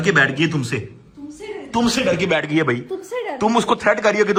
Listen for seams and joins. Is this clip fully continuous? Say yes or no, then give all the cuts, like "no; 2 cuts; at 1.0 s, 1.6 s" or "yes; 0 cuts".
yes; 0 cuts